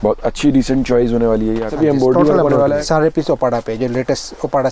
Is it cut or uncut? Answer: cut